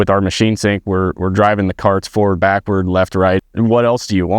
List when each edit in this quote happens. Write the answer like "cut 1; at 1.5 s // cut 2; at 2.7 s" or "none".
cut 1; at 3.4 s